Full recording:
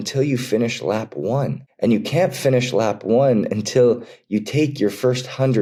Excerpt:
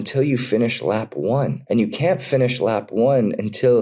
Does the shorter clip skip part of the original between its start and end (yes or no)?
yes